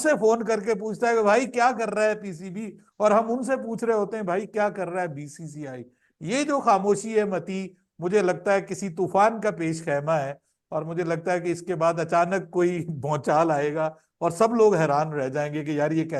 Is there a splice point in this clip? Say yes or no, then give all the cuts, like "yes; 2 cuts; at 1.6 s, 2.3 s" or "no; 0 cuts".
no; 0 cuts